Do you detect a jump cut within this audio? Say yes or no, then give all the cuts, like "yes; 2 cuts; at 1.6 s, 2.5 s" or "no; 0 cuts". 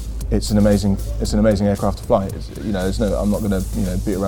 no; 0 cuts